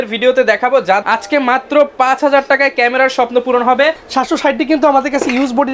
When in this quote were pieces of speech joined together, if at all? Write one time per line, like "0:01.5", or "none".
0:01.0
0:04.0